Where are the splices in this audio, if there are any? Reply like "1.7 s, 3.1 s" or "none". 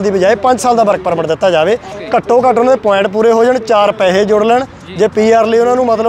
1.9 s